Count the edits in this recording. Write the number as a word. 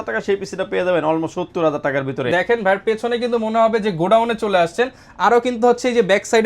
one